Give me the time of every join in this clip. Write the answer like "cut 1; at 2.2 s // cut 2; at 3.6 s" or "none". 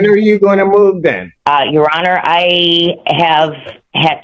cut 1; at 1.3 s